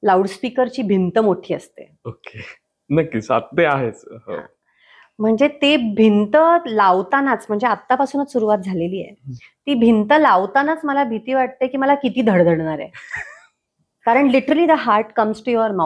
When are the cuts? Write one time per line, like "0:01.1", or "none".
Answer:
none